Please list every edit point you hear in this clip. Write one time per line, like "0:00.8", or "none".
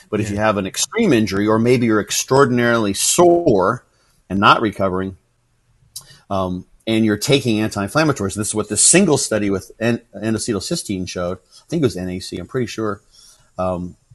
none